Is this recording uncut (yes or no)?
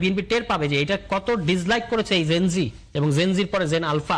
yes